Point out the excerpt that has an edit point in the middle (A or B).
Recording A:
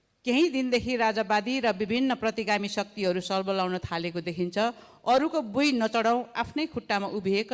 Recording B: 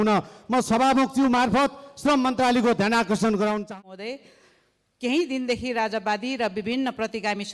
B